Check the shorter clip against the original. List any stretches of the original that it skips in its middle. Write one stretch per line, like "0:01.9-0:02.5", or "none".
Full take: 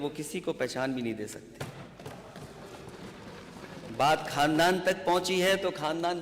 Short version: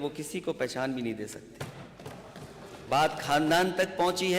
0:02.9-0:04.0